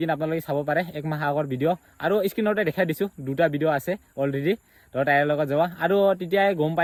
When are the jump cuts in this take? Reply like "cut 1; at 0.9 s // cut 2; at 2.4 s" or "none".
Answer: none